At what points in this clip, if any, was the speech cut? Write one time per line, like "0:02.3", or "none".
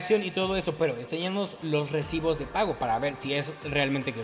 none